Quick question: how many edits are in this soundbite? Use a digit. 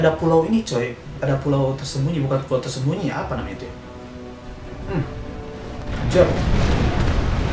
0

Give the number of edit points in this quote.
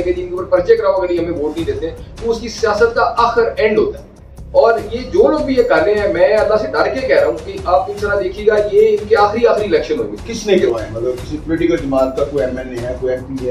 1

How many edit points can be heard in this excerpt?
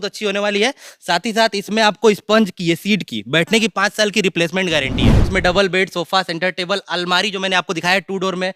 1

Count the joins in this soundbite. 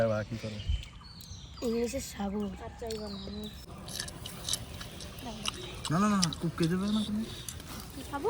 1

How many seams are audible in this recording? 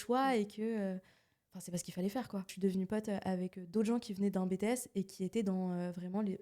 1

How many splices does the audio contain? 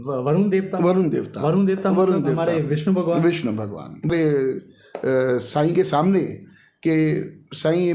1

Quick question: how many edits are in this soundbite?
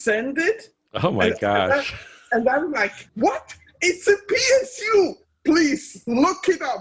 1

